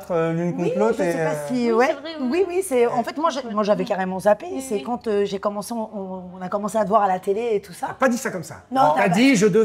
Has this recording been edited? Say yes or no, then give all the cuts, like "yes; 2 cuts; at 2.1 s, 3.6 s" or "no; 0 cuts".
no; 0 cuts